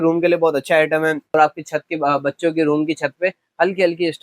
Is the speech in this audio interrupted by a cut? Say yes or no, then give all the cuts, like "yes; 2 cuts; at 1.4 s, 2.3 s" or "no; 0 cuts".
yes; 1 cut; at 1.3 s